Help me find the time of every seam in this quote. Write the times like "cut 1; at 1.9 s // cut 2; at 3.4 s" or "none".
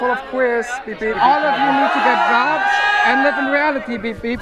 cut 1; at 1.2 s